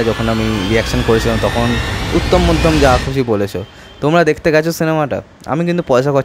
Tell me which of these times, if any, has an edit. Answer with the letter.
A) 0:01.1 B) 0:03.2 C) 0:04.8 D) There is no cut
D